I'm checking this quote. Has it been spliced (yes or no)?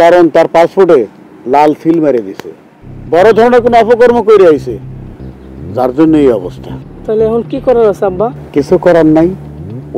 no